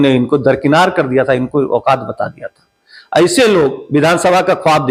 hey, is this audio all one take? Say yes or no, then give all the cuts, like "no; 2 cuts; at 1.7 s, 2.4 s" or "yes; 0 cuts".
yes; 0 cuts